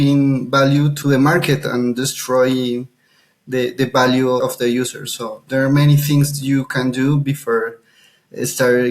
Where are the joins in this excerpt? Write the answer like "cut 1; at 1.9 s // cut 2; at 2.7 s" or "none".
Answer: cut 1; at 0.9 s // cut 2; at 4.4 s

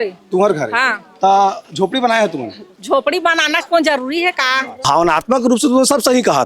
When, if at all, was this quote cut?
cut 1; at 4.7 s

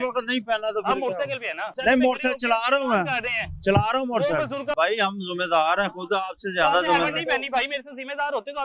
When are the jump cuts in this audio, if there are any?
cut 1; at 1.7 s // cut 2; at 4.7 s

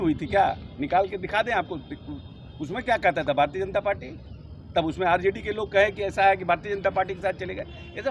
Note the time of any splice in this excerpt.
none

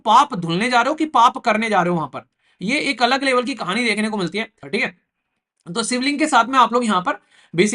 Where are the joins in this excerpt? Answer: cut 1; at 4.6 s

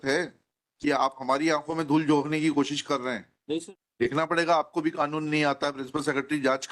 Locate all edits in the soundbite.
cut 1; at 3.6 s

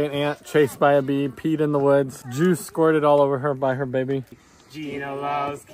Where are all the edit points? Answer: cut 1; at 4.3 s

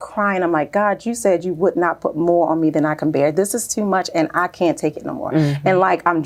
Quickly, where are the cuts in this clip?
none

